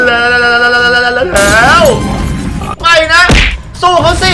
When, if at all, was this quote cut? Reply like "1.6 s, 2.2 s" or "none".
2.7 s